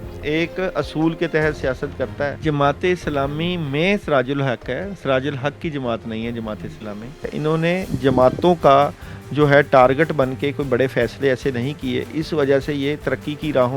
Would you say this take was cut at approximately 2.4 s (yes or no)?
yes